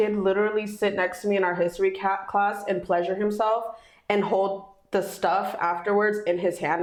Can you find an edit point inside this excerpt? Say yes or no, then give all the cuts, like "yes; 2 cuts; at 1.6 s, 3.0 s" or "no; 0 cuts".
no; 0 cuts